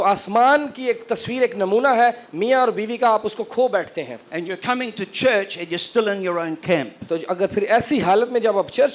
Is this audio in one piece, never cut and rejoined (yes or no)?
yes